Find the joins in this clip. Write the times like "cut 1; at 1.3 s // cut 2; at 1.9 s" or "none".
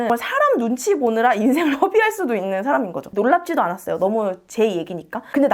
none